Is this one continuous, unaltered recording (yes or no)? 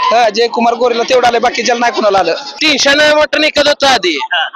no